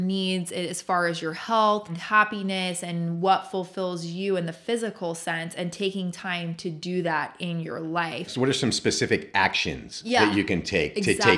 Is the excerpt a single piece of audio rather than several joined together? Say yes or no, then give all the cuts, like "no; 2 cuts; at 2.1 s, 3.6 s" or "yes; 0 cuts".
no; 2 cuts; at 2.0 s, 8.3 s